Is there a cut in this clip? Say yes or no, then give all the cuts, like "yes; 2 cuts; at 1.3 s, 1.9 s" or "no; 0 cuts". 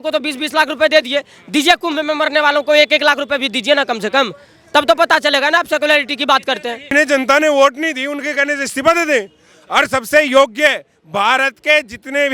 yes; 1 cut; at 6.9 s